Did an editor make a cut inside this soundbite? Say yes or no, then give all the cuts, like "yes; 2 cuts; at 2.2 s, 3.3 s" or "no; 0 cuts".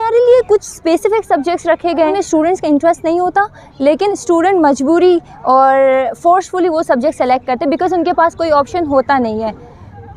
no; 0 cuts